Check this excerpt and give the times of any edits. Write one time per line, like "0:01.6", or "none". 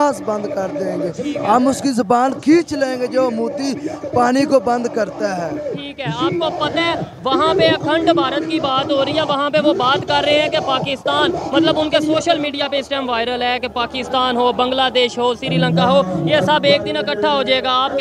none